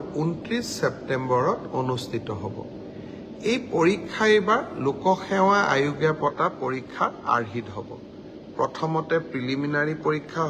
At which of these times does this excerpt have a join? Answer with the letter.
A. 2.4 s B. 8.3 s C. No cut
C